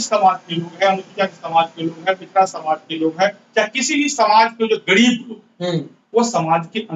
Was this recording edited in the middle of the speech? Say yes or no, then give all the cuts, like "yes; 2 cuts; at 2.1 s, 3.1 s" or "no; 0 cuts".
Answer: no; 0 cuts